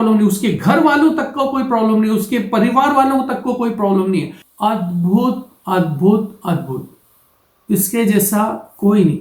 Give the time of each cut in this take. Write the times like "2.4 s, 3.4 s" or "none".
4.4 s